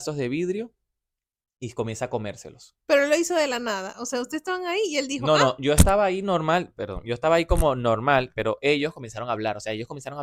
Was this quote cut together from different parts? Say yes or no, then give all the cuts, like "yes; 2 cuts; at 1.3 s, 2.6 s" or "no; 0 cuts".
no; 0 cuts